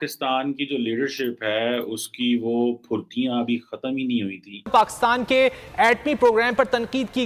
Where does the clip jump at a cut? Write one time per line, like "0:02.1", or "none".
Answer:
0:04.7